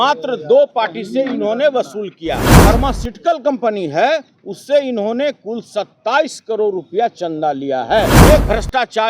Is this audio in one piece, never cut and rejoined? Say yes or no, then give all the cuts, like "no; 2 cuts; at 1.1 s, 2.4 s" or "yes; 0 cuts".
no; 2 cuts; at 2.5 s, 8.2 s